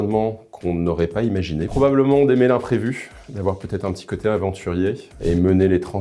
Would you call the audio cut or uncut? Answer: cut